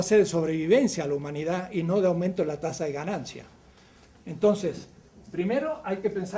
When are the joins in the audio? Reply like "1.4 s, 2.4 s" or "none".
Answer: none